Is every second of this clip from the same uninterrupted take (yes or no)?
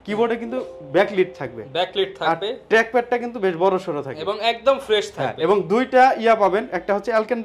yes